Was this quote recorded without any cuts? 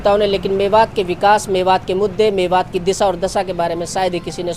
yes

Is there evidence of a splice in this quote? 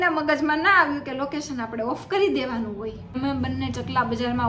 yes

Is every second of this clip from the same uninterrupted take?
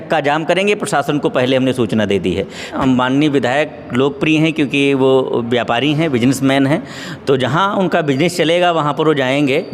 no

